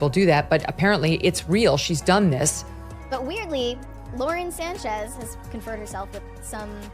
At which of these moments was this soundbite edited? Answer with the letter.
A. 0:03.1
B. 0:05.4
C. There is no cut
A